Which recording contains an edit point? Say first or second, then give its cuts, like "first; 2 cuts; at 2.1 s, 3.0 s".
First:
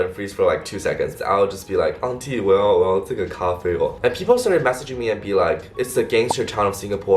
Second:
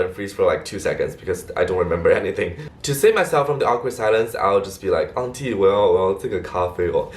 first; 2 cuts; at 1.2 s, 3.9 s